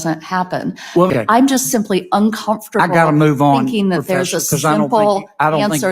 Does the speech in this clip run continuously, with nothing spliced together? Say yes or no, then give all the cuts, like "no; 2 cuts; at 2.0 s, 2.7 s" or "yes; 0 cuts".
no; 1 cut; at 1.1 s